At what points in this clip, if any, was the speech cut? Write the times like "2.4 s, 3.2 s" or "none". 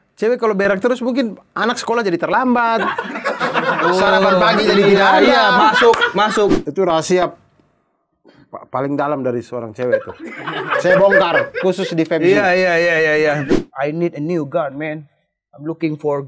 6.6 s, 13.6 s